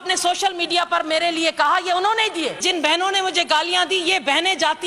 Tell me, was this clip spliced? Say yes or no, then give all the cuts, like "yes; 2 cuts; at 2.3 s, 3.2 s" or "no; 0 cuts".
yes; 1 cut; at 2.6 s